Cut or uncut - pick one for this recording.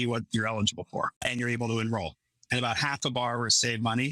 cut